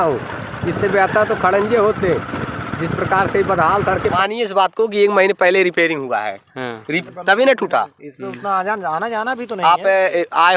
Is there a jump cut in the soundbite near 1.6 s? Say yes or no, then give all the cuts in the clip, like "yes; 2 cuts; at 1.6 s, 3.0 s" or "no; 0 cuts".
no; 2 cuts; at 4.1 s, 6.9 s